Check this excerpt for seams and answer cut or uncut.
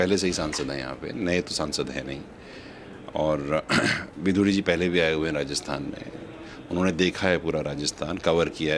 uncut